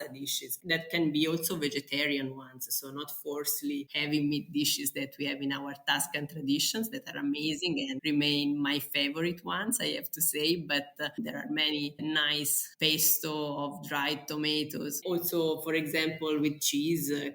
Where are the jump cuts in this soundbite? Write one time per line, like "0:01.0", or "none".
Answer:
0:03.9
0:08.0
0:15.0